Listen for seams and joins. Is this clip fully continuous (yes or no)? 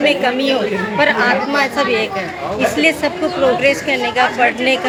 yes